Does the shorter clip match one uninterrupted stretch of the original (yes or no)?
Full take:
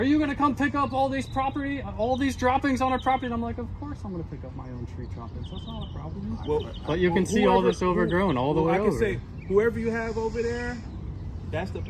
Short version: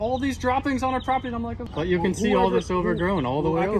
no